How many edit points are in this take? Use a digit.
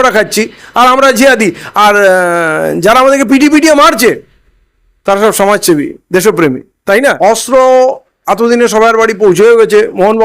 1